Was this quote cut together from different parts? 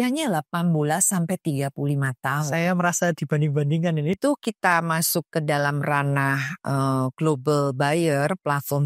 yes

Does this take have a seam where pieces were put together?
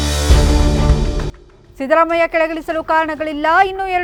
no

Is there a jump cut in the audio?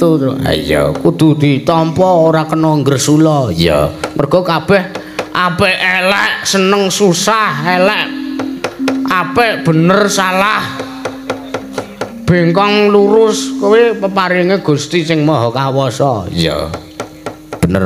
no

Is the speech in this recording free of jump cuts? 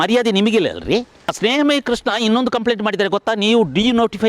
no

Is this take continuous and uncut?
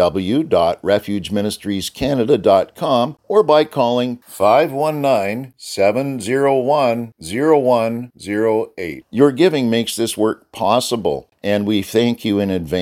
no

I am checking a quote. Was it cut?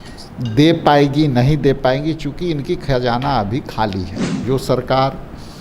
yes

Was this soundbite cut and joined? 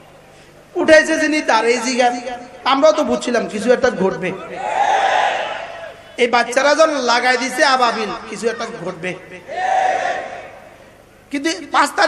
yes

